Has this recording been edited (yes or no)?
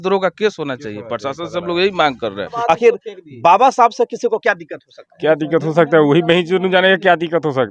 yes